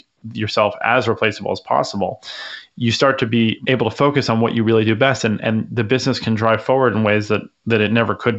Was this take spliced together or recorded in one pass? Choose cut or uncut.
cut